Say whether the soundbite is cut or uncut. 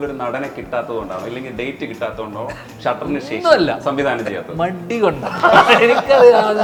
uncut